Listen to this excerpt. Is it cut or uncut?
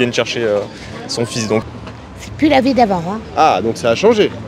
cut